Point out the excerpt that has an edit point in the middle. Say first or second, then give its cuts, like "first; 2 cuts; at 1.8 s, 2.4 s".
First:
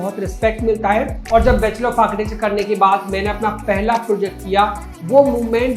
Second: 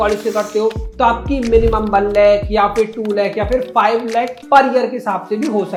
first; 2 cuts; at 1.3 s, 4.8 s